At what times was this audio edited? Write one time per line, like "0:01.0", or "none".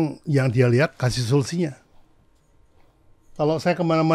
none